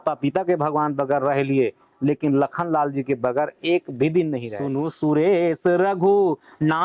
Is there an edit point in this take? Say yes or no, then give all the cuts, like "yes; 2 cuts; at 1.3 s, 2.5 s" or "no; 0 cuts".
yes; 1 cut; at 4.6 s